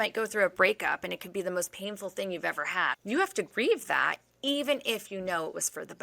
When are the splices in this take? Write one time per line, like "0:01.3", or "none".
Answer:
0:02.9